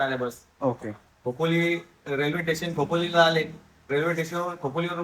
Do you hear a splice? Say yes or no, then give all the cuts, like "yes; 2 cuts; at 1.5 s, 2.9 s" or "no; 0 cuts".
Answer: no; 0 cuts